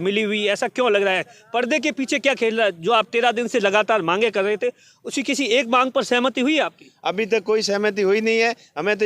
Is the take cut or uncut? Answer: uncut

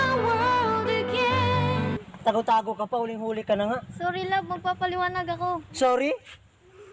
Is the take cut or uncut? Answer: cut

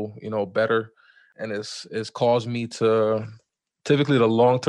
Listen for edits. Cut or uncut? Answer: cut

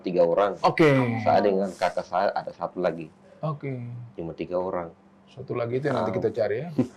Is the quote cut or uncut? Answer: uncut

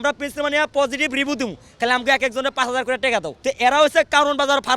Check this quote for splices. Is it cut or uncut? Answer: cut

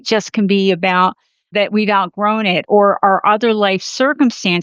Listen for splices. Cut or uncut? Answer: cut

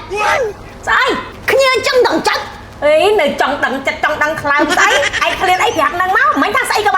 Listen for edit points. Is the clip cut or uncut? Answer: uncut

